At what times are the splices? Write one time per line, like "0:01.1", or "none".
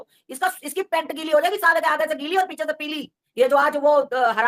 0:03.1